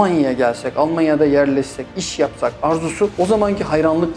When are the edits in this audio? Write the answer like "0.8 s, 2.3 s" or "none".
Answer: 3.1 s